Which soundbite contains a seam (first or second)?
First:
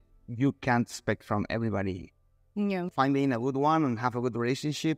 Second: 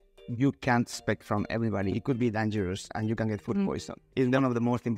second